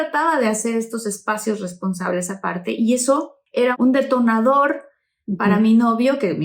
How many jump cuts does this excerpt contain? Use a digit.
1